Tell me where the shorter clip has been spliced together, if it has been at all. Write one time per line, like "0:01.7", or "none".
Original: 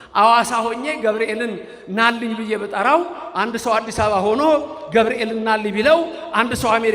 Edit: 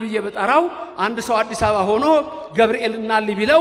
none